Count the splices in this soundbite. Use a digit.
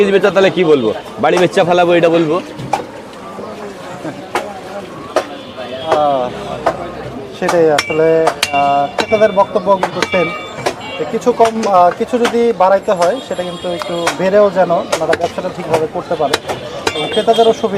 0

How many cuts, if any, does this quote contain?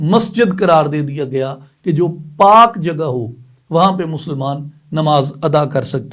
0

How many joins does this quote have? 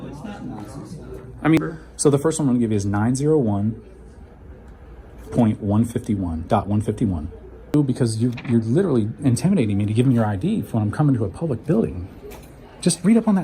2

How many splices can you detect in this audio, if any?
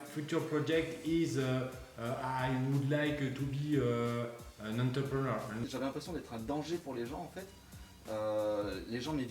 1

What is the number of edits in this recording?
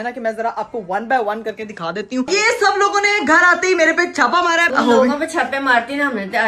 2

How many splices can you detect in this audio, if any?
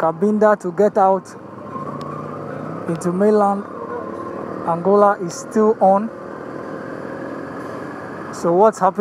0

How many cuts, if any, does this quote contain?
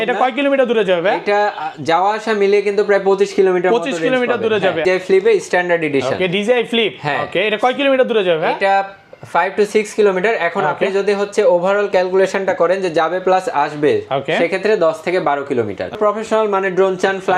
2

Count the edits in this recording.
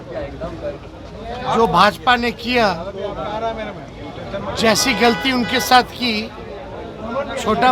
0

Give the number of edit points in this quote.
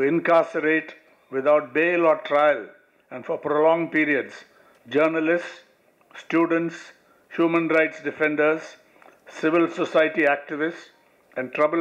0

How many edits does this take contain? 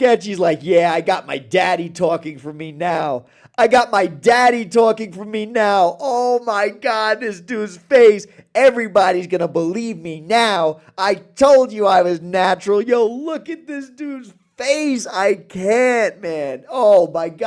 0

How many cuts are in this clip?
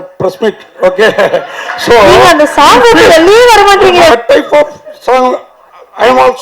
1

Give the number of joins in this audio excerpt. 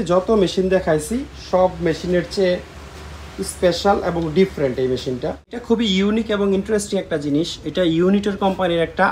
1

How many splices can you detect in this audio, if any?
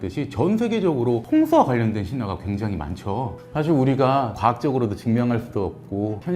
1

